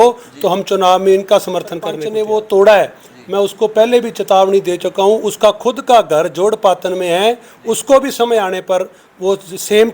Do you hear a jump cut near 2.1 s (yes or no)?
yes